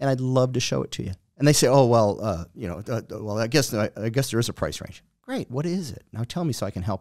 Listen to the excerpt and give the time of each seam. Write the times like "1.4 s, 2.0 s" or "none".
none